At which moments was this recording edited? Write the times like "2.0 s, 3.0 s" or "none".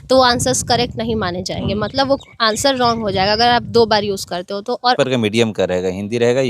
5.0 s